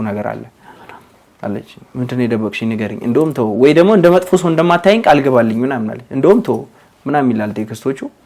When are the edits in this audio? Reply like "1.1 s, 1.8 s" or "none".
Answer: none